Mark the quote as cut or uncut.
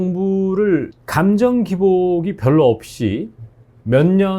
cut